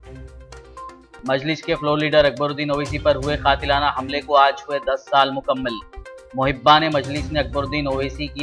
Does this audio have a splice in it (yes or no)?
yes